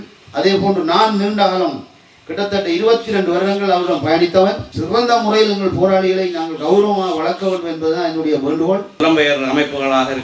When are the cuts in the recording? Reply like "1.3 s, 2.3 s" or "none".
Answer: 4.7 s, 9.0 s